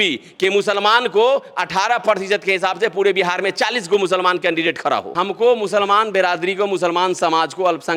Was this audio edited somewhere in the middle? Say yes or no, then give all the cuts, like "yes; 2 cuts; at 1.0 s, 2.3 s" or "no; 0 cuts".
no; 0 cuts